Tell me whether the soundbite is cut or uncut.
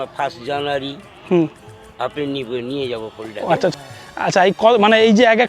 cut